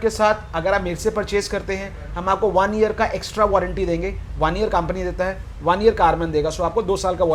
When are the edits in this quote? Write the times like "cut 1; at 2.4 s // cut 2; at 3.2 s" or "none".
none